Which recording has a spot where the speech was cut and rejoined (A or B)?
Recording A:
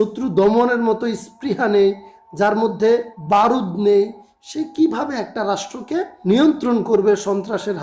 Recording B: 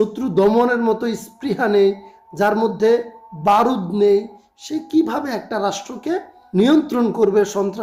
A